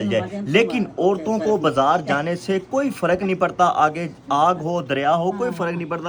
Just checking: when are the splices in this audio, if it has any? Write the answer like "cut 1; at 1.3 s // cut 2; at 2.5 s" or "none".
none